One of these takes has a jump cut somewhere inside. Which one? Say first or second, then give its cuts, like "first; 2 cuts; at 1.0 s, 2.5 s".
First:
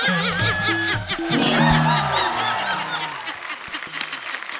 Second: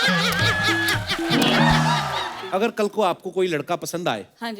second; 1 cut; at 2.4 s